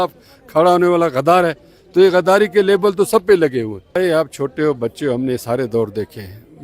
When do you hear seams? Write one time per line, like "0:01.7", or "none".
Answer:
0:04.0